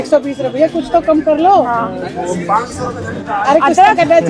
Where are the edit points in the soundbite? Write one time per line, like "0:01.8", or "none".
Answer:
none

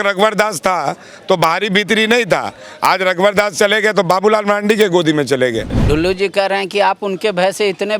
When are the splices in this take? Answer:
0:05.7

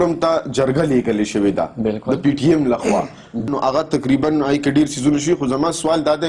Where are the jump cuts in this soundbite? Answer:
0:03.5

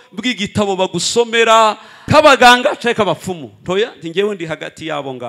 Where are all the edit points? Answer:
0:01.9

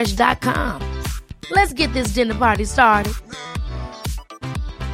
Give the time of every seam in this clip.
none

